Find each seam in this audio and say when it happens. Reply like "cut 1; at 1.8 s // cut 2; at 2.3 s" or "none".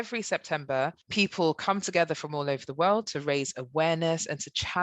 cut 1; at 1.0 s